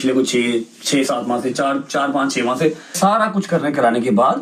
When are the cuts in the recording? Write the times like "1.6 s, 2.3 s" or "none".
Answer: 2.9 s